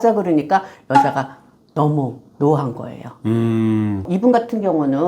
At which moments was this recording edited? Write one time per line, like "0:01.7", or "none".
0:04.0

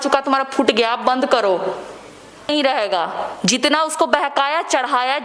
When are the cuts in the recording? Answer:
0:02.5

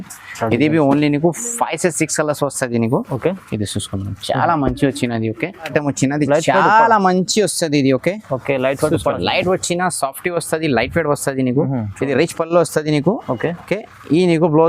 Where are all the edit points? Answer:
0:05.7

